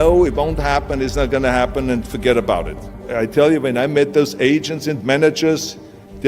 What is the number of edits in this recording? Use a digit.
1